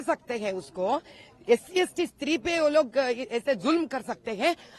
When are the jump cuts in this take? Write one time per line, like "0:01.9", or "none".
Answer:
none